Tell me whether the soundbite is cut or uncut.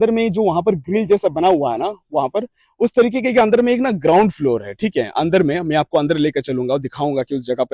uncut